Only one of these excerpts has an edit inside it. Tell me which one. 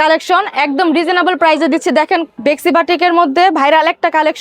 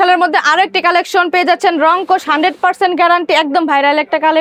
first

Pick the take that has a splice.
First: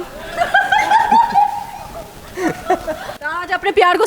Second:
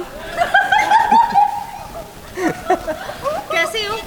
first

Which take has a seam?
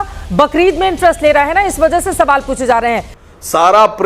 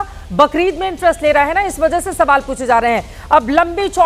first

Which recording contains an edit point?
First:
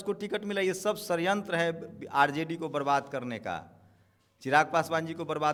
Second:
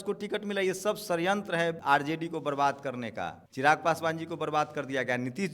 second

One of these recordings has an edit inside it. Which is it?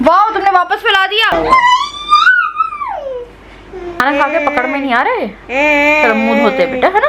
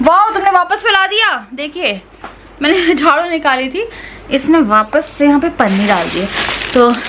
first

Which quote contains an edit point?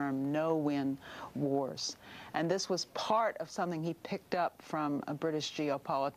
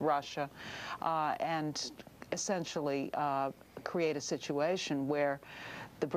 first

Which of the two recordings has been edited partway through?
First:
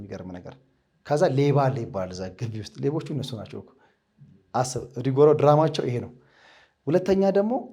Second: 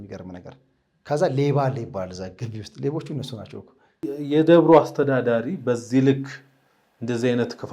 second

